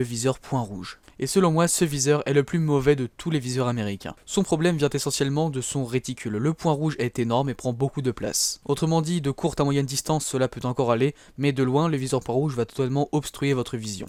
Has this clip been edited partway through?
no; 0 cuts

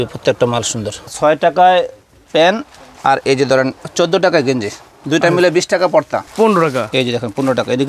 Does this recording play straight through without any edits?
no; 2 cuts; at 1.1 s, 6.2 s

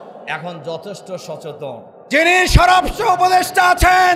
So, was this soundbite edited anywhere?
yes; 1 cut; at 2.0 s

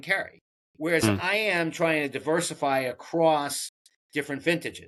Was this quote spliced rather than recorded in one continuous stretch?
no; 0 cuts

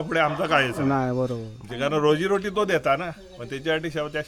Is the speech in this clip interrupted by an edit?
no; 0 cuts

